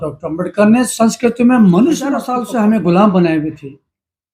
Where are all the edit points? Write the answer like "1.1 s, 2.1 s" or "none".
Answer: 2.4 s